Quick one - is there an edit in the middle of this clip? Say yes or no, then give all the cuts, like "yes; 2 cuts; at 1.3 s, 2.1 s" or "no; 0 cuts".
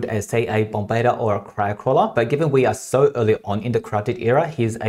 no; 0 cuts